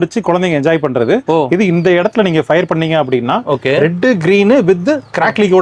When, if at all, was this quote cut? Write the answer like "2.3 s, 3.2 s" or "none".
none